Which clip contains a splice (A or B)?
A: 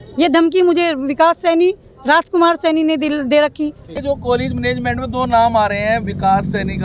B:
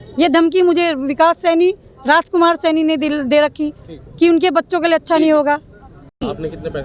A